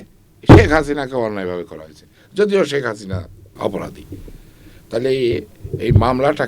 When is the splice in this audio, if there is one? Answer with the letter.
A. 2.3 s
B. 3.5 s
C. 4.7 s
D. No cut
B